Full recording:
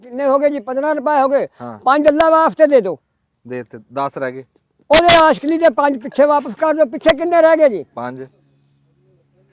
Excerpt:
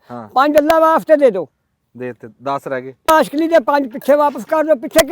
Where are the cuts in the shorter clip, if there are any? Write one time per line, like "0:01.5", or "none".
0:03.1